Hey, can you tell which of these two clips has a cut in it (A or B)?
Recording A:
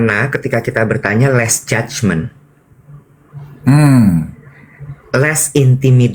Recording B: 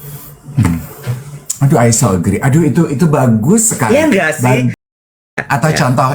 B